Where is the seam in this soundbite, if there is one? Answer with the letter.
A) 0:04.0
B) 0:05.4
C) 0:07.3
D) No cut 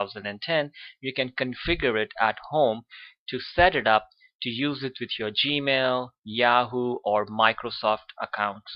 B